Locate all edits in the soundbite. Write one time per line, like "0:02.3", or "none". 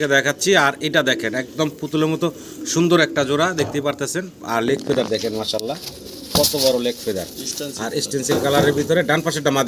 none